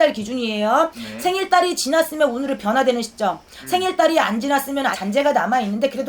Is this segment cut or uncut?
uncut